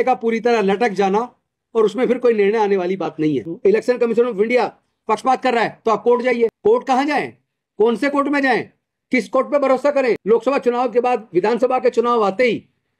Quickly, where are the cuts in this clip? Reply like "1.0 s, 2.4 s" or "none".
3.5 s, 6.6 s, 10.2 s